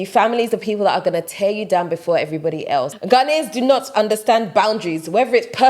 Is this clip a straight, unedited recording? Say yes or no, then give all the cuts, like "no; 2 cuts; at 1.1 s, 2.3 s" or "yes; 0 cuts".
no; 1 cut; at 2.9 s